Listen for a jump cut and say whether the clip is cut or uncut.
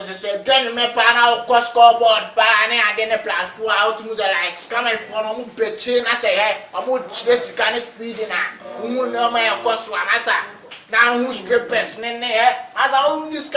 uncut